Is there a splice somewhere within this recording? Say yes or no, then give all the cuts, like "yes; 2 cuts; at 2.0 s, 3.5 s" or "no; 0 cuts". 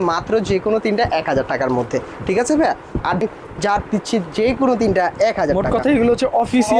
yes; 1 cut; at 3.2 s